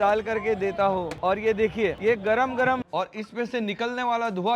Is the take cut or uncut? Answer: cut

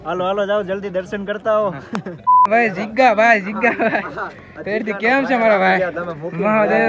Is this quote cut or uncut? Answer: cut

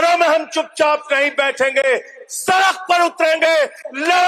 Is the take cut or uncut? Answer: uncut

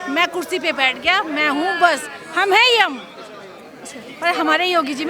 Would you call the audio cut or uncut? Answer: uncut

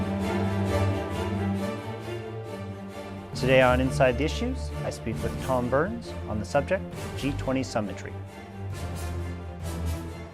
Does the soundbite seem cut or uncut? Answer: uncut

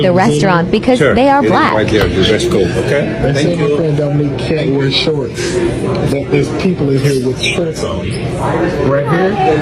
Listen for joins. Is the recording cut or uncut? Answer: uncut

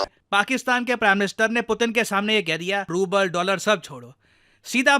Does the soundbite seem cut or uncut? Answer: cut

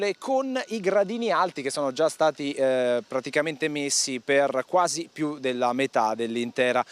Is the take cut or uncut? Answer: cut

